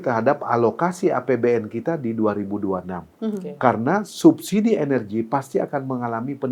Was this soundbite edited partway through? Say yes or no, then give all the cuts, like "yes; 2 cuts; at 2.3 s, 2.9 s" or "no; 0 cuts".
no; 0 cuts